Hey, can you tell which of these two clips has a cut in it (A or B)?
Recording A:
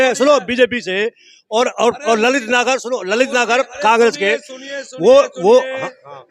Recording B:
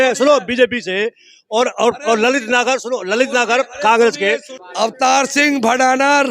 B